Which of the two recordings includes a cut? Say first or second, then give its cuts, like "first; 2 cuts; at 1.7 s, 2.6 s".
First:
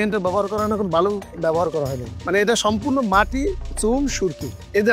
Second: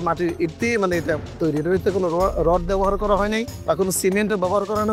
first; 1 cut; at 2.1 s